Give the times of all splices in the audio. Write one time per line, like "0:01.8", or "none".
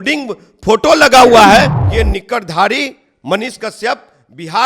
0:01.8